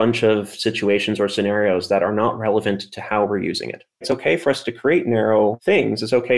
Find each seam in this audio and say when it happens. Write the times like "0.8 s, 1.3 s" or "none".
4.0 s, 5.6 s